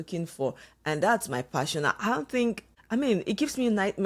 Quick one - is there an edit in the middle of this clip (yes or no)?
yes